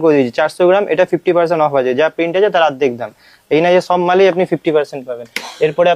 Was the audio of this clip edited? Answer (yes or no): no